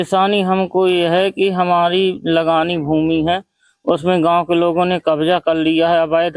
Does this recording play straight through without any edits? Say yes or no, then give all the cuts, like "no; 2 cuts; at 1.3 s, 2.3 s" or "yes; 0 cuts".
no; 1 cut; at 1.5 s